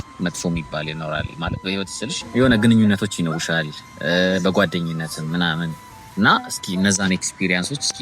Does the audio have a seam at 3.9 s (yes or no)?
no